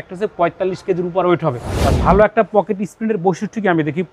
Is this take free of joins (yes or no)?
no